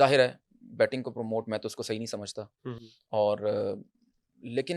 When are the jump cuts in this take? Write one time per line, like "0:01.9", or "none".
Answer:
none